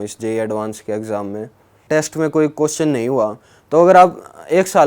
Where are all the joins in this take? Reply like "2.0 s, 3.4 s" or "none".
1.8 s